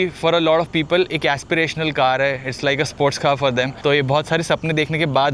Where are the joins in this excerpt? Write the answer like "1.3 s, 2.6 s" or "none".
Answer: 3.7 s